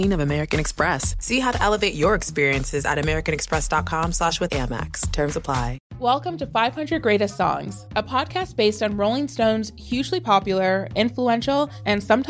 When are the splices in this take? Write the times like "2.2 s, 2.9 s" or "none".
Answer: 5.8 s